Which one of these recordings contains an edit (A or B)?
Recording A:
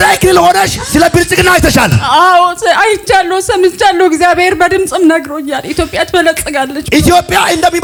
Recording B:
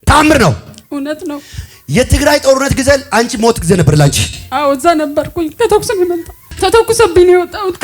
B